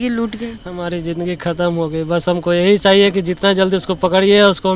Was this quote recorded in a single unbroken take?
yes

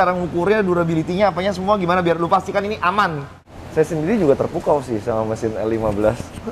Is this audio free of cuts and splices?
no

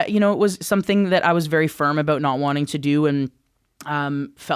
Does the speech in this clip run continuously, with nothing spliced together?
yes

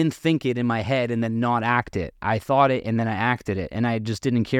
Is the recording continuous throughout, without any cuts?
yes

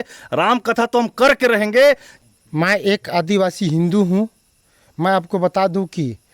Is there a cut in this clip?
yes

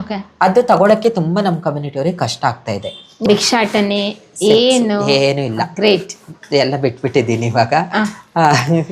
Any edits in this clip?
yes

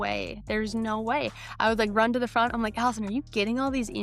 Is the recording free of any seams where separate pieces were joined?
yes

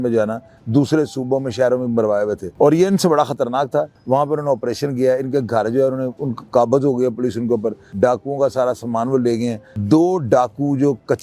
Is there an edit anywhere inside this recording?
yes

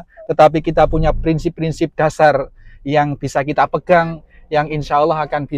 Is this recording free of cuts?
yes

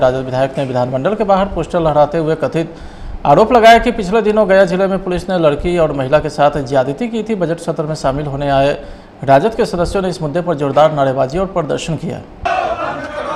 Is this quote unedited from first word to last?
yes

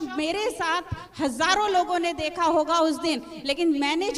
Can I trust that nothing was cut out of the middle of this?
yes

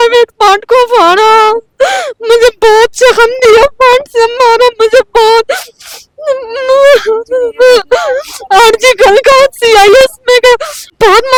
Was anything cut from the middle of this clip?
no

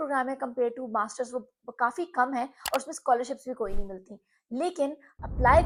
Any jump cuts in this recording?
no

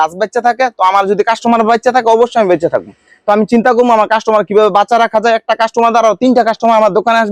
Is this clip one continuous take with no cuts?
yes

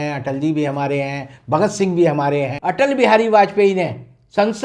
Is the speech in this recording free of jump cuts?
no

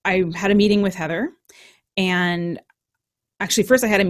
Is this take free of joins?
yes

